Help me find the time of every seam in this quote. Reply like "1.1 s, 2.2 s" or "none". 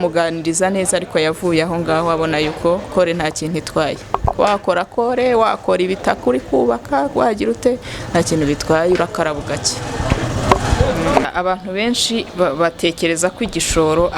11.3 s